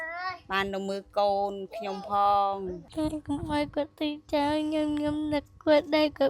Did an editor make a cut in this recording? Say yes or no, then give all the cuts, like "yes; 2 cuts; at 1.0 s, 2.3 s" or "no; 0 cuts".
yes; 1 cut; at 2.9 s